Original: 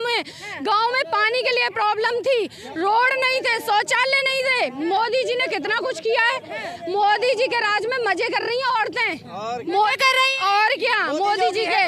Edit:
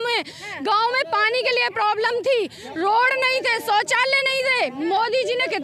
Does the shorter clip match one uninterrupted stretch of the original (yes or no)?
yes